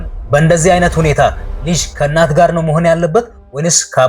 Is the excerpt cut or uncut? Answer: uncut